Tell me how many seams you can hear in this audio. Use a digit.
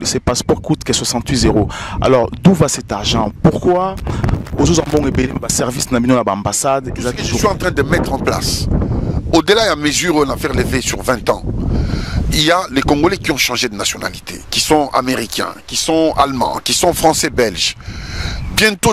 1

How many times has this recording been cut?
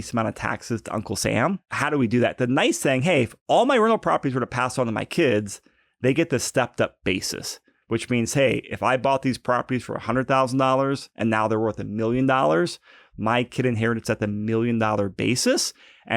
1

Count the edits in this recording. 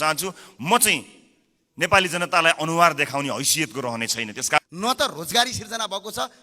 1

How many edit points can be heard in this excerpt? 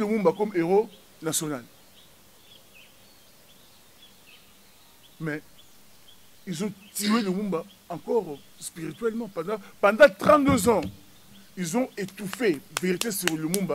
0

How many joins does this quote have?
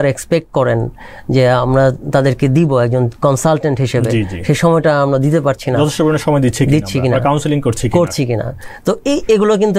0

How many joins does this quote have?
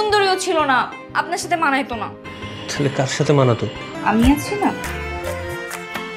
1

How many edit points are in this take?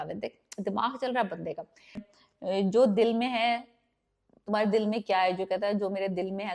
1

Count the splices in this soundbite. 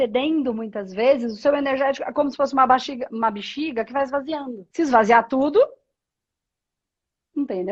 1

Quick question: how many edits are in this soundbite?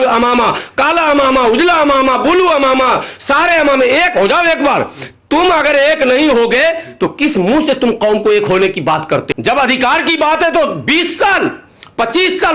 1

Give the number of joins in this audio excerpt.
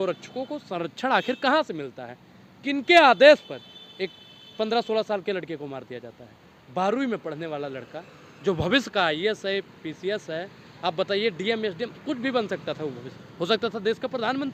0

